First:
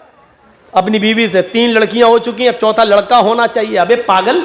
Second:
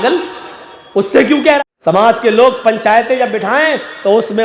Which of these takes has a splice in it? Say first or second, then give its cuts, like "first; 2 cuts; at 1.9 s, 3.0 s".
second; 1 cut; at 1.6 s